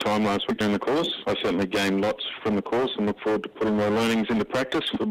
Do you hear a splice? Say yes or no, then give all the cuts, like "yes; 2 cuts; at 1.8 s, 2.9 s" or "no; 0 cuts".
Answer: yes; 2 cuts; at 1.2 s, 2.3 s